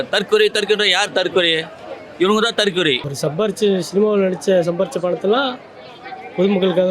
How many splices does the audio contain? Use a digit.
1